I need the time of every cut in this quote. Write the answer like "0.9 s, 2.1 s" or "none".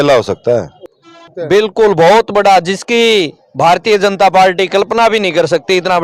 1.2 s